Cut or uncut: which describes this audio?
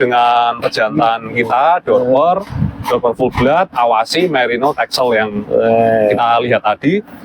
uncut